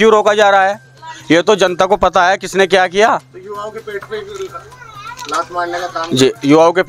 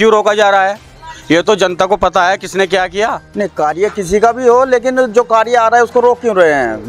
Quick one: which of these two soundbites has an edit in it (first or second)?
second